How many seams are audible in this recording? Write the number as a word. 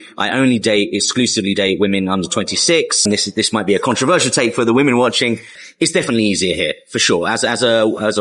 two